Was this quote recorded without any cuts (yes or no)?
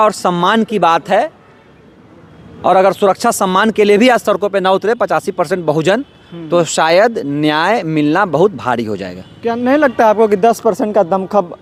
yes